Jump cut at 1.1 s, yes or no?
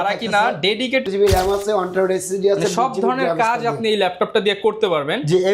yes